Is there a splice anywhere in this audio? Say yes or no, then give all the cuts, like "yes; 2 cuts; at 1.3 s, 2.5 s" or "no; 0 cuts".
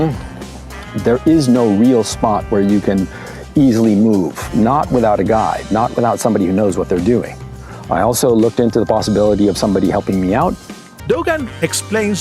yes; 1 cut; at 10.9 s